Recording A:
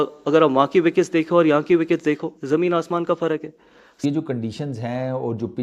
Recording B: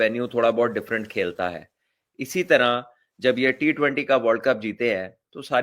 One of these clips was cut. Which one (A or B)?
A